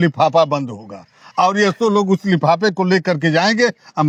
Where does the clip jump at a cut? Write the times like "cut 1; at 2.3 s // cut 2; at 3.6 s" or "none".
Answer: none